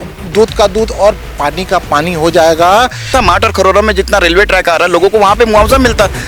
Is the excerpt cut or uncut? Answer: cut